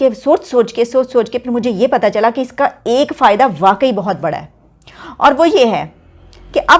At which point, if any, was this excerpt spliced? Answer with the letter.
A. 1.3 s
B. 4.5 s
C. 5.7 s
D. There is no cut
D